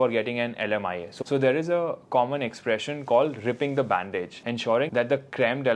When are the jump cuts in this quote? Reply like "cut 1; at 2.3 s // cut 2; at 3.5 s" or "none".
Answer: cut 1; at 1.1 s // cut 2; at 4.4 s